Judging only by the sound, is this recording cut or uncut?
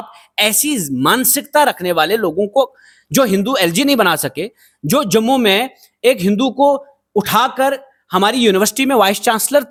uncut